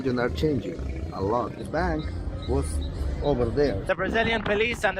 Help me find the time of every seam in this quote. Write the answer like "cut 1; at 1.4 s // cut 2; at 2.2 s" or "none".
cut 1; at 1.6 s // cut 2; at 3.8 s